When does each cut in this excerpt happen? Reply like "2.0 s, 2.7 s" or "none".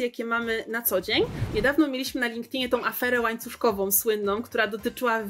1.4 s